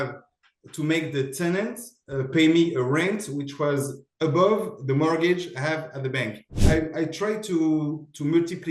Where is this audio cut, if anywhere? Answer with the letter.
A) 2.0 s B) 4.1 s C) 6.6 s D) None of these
C